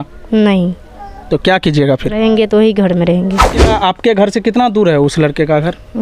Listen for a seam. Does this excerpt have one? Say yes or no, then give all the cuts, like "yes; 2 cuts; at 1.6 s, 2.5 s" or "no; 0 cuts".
yes; 1 cut; at 3.7 s